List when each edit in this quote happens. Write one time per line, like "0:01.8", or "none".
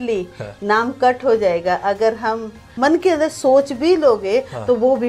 0:02.7

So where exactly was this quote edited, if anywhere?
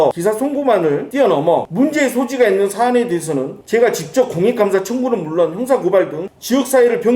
none

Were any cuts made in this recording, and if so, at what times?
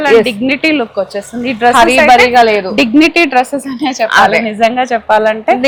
none

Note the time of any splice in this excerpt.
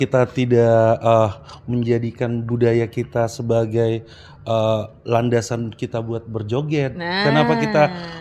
none

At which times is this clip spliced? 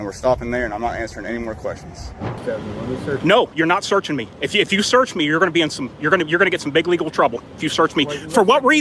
0:02.4

